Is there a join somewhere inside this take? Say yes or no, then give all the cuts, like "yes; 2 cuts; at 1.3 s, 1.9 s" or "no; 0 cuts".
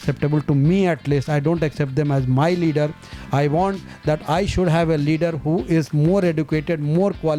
no; 0 cuts